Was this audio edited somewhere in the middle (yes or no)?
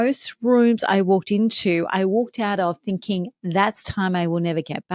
no